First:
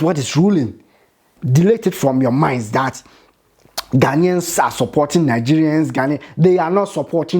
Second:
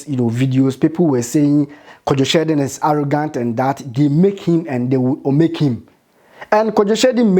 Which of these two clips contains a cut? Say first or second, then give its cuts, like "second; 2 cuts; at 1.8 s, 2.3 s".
first; 1 cut; at 1.4 s